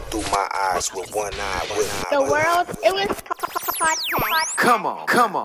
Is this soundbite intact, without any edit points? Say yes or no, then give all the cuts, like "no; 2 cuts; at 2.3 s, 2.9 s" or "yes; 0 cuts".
no; 1 cut; at 4.5 s